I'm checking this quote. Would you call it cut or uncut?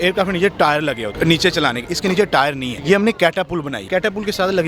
cut